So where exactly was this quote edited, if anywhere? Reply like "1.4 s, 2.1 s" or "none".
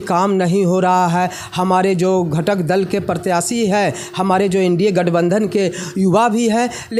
none